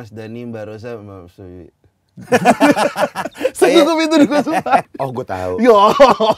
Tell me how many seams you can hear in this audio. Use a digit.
1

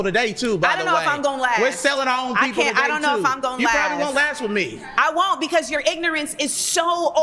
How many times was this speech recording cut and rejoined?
0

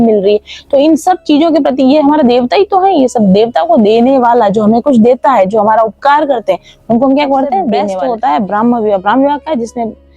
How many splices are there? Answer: 1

